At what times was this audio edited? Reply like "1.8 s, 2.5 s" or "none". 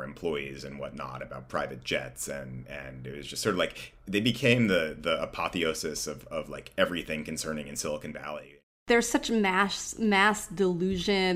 8.7 s